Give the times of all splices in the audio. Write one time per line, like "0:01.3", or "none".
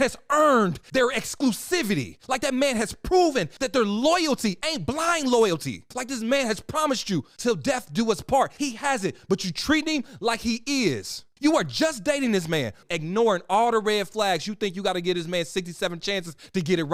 none